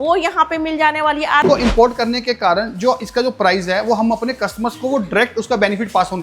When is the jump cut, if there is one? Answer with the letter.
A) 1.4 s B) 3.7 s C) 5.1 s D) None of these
A